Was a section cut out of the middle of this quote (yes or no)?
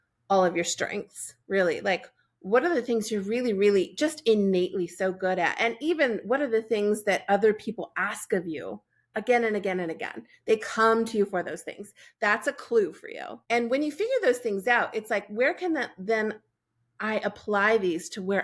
yes